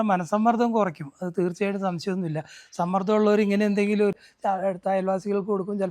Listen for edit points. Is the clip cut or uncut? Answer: cut